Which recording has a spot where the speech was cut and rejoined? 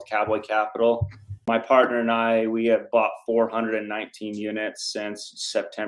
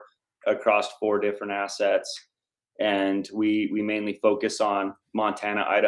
first; 1 cut; at 1.3 s

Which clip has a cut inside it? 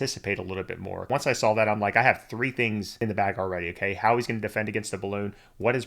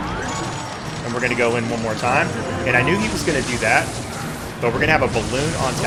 first; 2 cuts; at 1.0 s, 3.0 s

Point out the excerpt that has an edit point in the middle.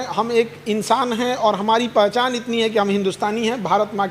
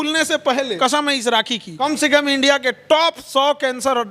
second; 2 cuts; at 0.8 s, 1.7 s

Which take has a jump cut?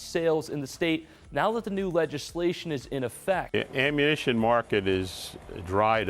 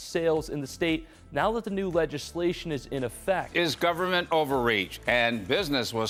first; 1 cut; at 3.5 s

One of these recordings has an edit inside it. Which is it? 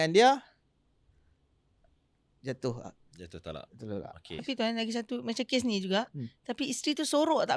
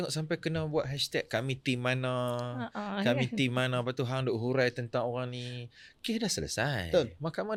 first; 1 cut; at 4.4 s

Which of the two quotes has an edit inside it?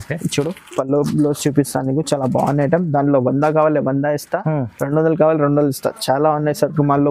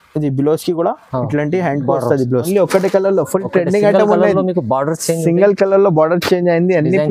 second; 1 cut; at 2.5 s

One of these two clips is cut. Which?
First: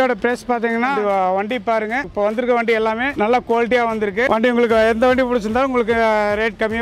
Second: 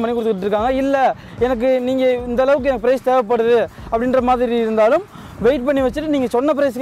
first; 4 cuts; at 1.0 s, 2.1 s, 3.1 s, 4.3 s

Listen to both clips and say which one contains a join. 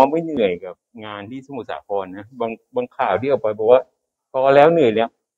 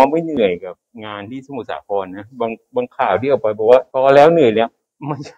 second; 1 cut; at 3.9 s

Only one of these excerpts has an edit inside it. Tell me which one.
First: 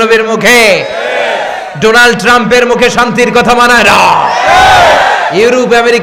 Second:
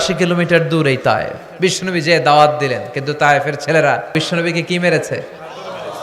second; 2 cuts; at 1.4 s, 4.1 s

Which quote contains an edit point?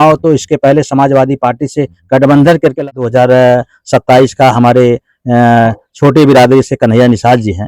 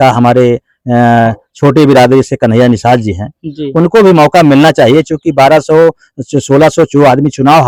first; 1 cut; at 2.8 s

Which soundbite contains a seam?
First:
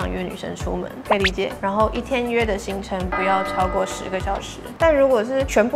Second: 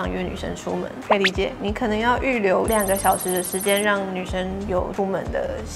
first; 2 cuts; at 1.6 s, 4.6 s

